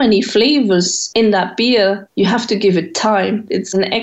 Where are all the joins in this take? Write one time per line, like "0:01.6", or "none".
0:01.0
0:02.0